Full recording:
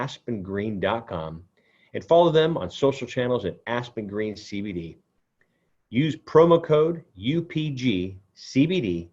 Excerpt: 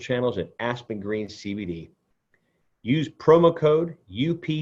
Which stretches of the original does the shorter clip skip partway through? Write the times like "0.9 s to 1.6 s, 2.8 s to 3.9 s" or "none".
none